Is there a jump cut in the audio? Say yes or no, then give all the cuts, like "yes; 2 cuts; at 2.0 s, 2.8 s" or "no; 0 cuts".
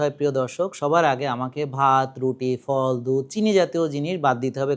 no; 0 cuts